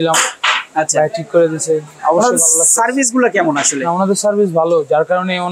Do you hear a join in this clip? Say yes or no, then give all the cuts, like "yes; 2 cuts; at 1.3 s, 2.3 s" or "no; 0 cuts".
no; 0 cuts